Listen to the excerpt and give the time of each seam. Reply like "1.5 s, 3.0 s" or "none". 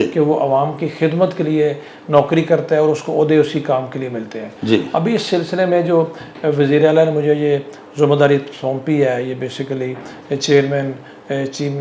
none